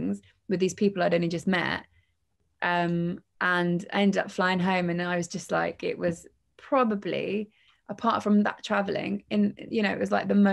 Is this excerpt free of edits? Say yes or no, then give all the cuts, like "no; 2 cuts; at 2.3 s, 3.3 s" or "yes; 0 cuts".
yes; 0 cuts